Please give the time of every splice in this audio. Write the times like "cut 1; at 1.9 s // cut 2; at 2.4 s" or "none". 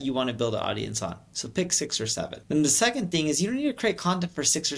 cut 1; at 2.4 s